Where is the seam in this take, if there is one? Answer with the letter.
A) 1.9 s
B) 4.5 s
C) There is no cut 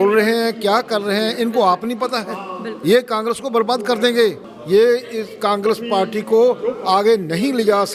B